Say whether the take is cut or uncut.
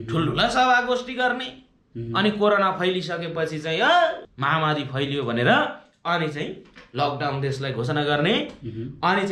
cut